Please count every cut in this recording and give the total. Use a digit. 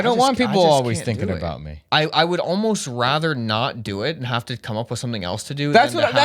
1